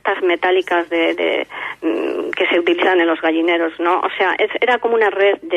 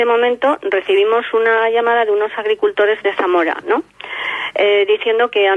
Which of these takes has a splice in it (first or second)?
second